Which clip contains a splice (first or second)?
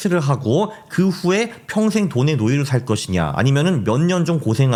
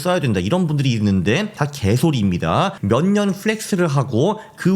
second